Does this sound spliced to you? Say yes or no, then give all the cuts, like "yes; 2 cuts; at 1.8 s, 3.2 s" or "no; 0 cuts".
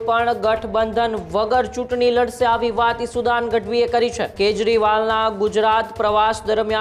yes; 1 cut; at 4.2 s